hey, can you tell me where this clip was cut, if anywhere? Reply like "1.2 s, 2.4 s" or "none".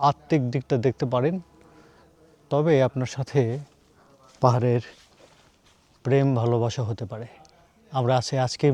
none